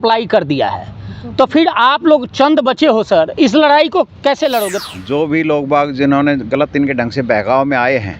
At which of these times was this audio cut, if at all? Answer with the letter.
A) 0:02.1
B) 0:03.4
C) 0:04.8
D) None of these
C